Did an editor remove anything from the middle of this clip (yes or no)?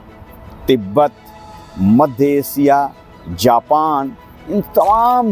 no